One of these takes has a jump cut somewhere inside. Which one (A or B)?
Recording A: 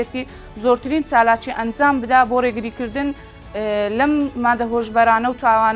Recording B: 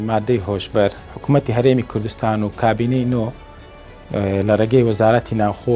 B